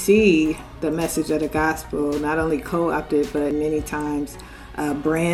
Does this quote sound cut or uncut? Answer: cut